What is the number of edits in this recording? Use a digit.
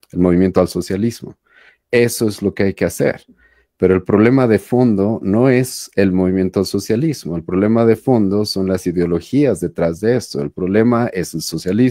0